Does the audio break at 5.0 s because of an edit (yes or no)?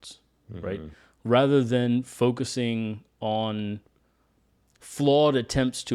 no